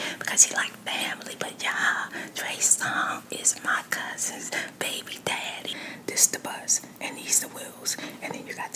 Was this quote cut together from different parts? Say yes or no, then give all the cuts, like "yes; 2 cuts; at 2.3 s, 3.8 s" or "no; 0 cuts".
yes; 1 cut; at 5.8 s